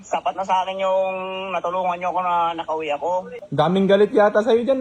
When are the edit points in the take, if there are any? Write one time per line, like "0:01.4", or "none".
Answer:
0:03.4